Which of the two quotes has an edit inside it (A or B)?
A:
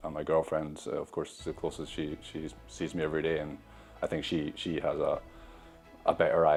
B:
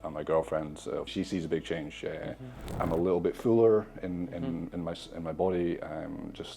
B